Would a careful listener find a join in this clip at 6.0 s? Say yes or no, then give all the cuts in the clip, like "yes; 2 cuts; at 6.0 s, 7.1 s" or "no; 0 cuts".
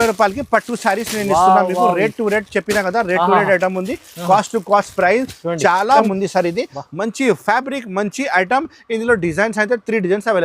yes; 1 cut; at 6.0 s